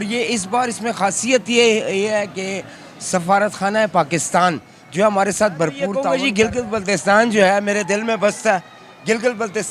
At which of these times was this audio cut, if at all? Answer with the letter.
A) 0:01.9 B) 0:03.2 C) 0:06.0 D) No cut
C